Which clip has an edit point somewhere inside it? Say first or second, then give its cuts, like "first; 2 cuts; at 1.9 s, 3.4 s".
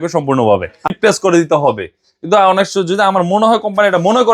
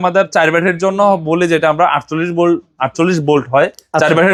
first; 1 cut; at 0.9 s